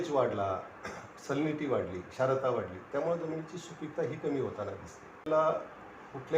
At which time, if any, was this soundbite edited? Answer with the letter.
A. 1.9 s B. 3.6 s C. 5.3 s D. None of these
C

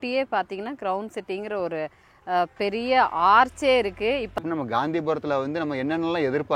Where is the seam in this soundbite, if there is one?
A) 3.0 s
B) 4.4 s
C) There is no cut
B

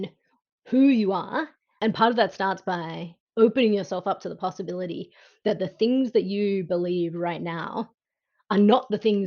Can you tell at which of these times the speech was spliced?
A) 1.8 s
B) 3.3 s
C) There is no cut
A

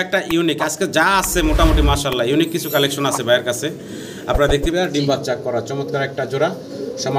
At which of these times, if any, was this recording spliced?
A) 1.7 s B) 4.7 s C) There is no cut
B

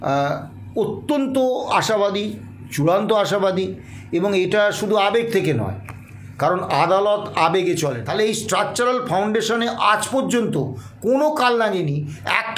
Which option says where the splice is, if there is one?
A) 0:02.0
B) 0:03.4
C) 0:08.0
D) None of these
C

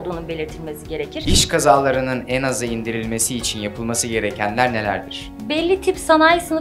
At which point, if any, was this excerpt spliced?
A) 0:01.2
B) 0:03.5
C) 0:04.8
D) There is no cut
A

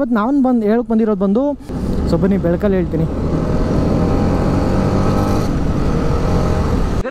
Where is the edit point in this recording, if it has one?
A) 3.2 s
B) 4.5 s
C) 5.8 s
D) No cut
D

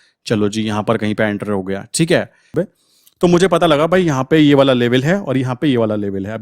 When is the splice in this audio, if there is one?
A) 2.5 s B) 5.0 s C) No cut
A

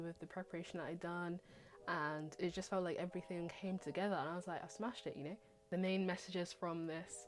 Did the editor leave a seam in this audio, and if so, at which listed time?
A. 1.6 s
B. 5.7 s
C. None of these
B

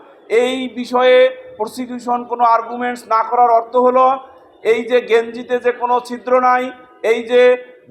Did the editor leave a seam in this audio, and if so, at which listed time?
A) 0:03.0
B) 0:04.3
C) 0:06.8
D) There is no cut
D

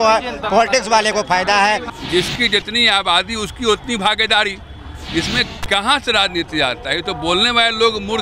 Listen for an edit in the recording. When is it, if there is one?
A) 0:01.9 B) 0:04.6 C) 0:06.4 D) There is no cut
A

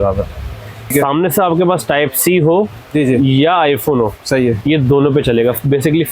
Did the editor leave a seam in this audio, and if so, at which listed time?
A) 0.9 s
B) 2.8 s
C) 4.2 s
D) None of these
A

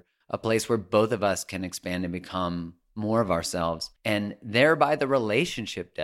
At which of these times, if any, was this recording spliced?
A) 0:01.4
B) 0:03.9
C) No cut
B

